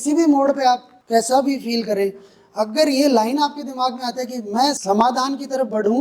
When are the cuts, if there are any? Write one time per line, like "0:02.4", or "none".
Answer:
0:00.9
0:04.8